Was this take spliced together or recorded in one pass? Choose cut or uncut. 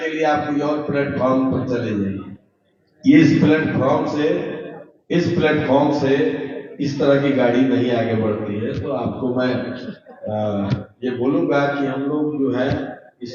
uncut